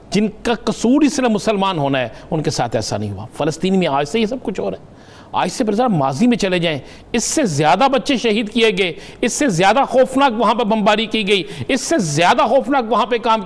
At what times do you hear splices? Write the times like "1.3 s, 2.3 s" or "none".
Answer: none